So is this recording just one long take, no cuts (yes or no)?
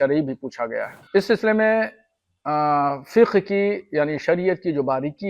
no